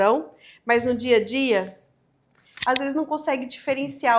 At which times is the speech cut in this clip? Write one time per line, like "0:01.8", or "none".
0:02.5